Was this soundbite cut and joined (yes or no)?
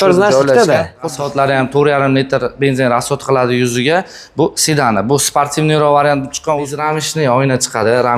yes